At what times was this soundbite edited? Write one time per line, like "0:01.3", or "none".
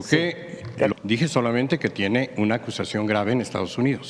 0:00.9